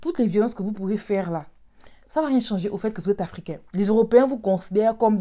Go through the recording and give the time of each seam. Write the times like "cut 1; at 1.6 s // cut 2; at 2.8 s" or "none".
none